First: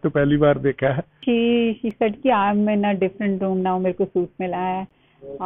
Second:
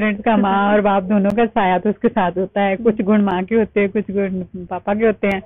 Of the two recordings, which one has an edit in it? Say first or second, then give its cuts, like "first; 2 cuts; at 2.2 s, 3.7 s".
first; 1 cut; at 1.2 s